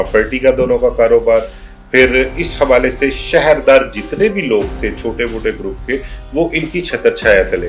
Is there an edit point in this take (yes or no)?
no